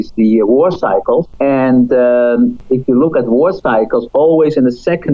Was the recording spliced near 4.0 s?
no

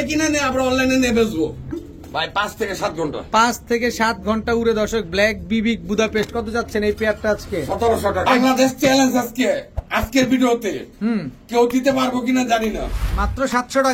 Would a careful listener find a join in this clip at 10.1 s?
no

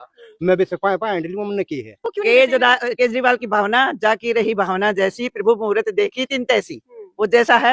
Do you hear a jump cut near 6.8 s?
no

